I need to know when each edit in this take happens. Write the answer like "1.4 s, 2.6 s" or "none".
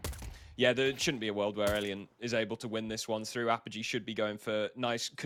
none